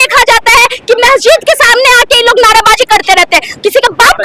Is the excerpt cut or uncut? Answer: uncut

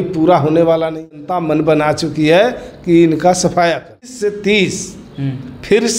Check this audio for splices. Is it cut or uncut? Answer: cut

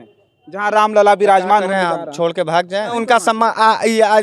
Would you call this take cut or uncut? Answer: cut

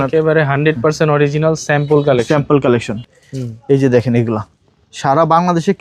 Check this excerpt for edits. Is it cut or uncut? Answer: cut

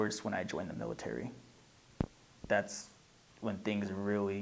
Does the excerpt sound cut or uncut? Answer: uncut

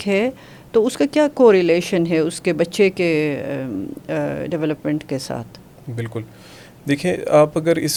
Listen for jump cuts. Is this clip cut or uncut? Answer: uncut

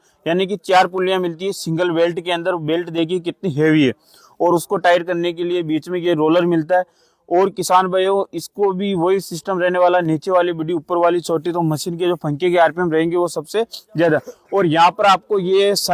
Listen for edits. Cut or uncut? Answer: uncut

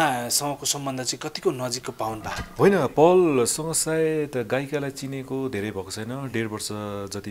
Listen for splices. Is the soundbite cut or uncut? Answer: uncut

